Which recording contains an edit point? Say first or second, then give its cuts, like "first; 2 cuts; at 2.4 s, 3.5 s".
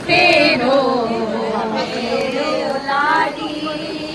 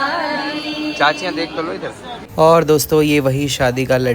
second; 1 cut; at 2.2 s